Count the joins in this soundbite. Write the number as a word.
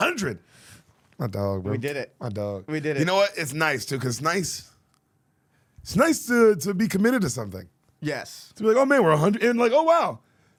zero